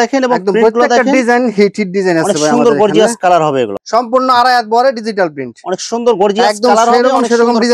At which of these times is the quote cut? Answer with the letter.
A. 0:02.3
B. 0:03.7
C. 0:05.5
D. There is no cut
B